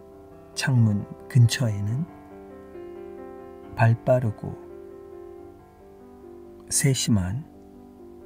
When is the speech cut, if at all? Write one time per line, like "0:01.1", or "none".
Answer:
0:02.1
0:03.6
0:04.5
0:06.8